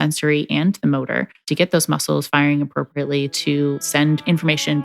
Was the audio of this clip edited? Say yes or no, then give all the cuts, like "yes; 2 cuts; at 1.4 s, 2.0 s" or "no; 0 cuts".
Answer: yes; 1 cut; at 3.9 s